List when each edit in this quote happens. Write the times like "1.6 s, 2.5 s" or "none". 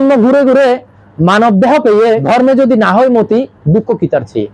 2.2 s